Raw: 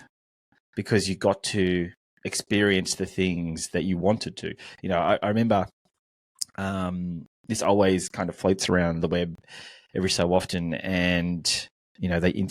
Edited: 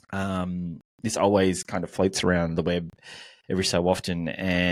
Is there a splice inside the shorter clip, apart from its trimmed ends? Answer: no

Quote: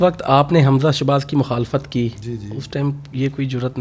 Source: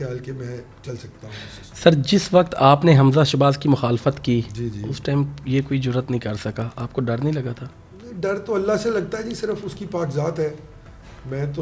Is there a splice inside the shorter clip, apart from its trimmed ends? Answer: no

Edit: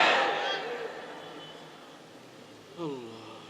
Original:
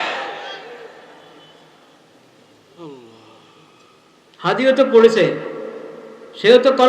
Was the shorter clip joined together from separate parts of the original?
no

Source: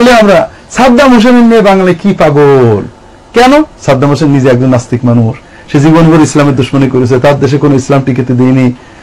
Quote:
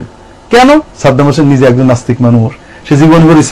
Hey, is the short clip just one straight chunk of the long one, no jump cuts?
yes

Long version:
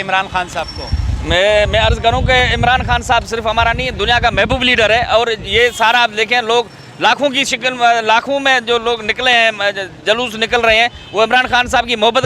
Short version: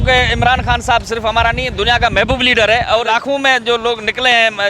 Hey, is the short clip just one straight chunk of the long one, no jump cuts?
no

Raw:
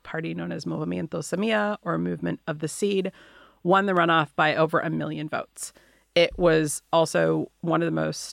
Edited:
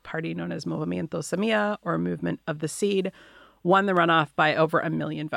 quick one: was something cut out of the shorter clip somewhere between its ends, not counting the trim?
no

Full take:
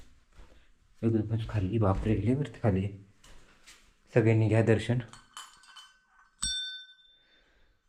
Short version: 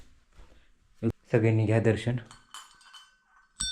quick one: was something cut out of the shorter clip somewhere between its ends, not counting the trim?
yes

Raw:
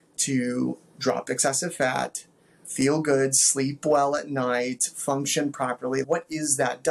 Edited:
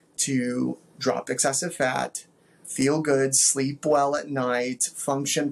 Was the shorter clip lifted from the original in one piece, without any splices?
yes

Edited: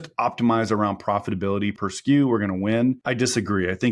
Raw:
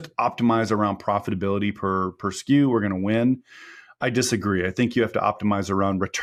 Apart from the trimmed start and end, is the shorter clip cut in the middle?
yes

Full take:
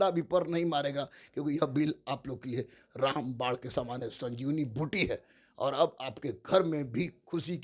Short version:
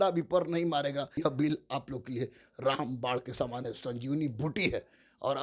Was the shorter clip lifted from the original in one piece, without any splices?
no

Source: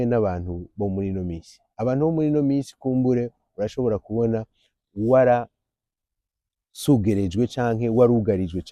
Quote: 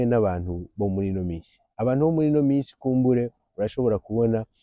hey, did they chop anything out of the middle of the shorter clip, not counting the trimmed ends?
no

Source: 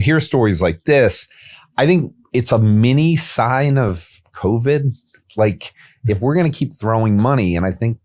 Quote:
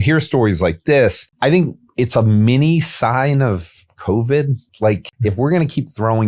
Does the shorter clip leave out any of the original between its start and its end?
yes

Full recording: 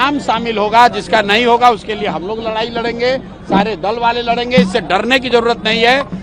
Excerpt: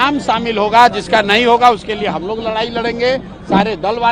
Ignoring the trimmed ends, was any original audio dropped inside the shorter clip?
no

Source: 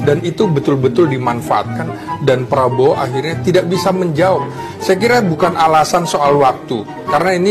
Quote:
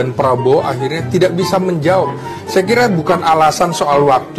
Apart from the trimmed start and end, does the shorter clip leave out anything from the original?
no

